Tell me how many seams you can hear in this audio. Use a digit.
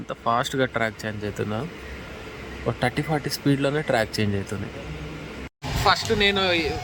1